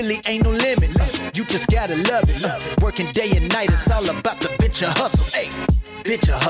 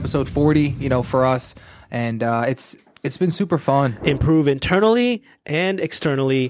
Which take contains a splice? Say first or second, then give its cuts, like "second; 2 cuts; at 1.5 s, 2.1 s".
second; 1 cut; at 4.0 s